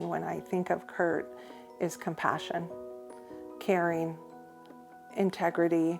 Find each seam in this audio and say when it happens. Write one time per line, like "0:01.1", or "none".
none

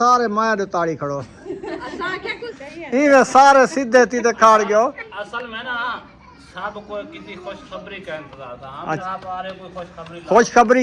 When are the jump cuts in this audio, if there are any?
0:01.4
0:02.6
0:09.0

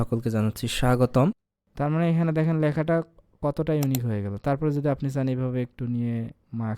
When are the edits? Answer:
0:01.4

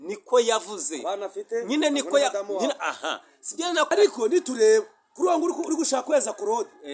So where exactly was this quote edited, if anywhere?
0:03.9

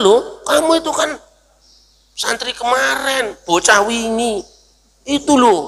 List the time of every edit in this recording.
none

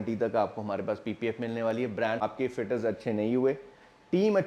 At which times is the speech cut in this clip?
0:02.2

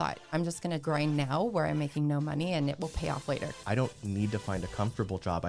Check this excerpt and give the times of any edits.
0:00.7
0:03.5

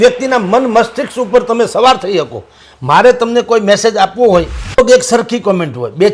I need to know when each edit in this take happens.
0:04.8

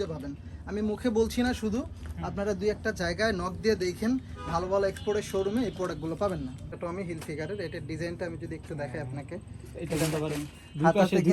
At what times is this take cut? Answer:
0:06.8

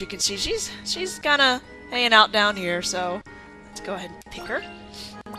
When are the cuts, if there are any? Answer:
none

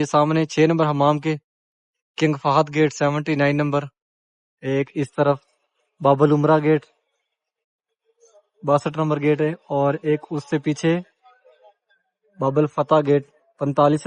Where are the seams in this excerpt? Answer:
none

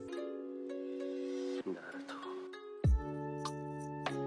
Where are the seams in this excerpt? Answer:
0:03.0

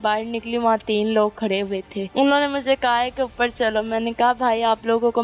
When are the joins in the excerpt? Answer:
0:02.0

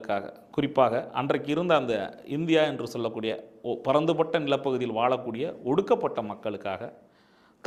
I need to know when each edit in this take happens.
none

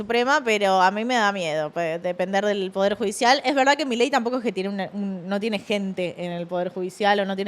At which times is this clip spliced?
none

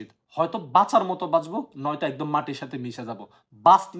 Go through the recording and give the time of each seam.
none

